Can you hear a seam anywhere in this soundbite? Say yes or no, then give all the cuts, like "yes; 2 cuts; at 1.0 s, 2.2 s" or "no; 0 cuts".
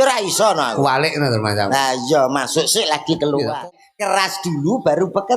yes; 1 cut; at 3.6 s